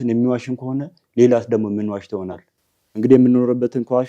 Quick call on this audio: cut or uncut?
uncut